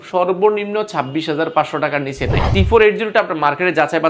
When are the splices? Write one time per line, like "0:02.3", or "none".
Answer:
none